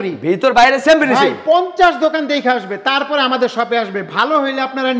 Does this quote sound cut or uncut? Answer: uncut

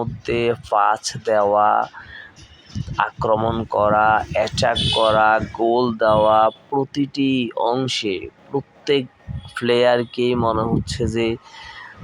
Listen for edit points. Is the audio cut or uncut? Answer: uncut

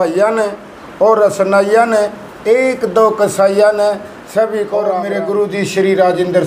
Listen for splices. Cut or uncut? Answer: cut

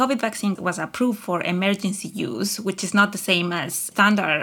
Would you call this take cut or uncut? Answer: uncut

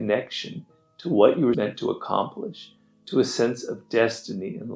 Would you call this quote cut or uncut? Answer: cut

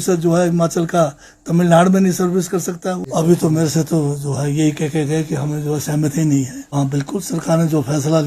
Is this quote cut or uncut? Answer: cut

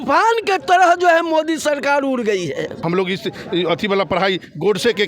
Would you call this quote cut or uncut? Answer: cut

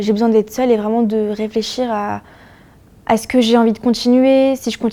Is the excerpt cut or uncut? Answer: uncut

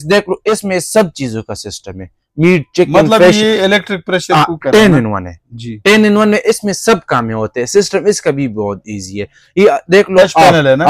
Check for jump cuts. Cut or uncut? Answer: uncut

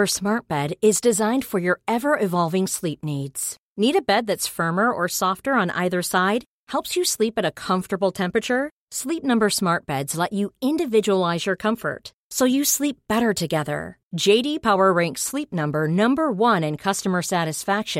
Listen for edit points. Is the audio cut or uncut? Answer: uncut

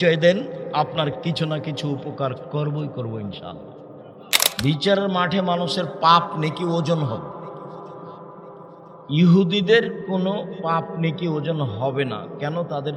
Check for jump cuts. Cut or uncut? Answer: cut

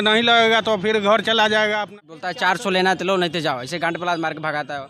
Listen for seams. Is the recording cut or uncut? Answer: cut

